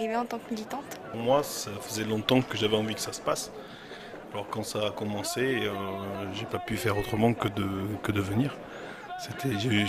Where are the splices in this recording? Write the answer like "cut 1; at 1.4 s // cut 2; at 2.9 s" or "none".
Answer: cut 1; at 1.1 s